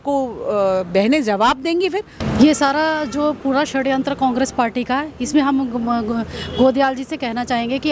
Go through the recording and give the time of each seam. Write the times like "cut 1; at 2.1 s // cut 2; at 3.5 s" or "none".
cut 1; at 2.1 s